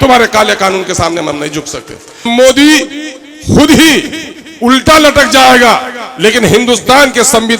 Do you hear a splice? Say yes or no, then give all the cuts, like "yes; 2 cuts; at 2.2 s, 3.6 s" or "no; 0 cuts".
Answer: yes; 1 cut; at 2.3 s